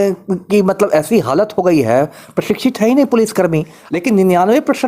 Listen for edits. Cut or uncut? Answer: cut